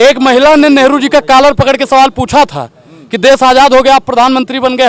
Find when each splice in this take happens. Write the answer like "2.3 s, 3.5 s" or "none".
none